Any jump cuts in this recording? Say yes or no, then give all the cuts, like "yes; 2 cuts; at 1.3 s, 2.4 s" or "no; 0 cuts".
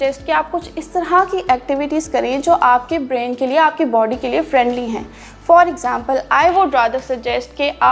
no; 0 cuts